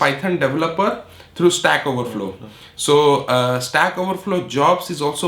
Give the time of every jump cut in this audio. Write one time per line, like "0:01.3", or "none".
none